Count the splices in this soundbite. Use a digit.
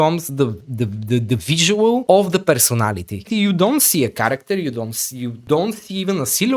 3